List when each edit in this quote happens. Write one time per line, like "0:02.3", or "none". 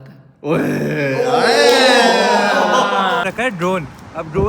0:03.2